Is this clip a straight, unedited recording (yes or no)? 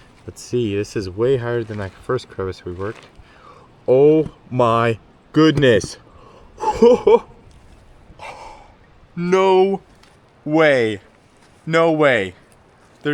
yes